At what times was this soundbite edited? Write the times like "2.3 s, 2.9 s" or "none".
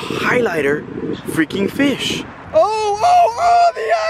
2.4 s